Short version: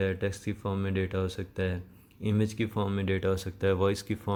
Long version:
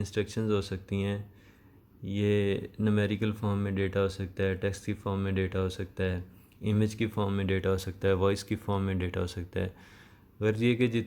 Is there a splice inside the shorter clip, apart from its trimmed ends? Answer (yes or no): no